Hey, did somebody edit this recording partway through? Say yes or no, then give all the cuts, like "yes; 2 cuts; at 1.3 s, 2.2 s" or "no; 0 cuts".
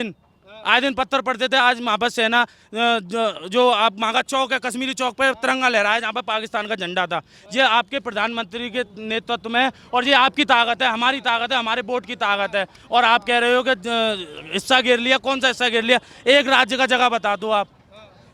no; 0 cuts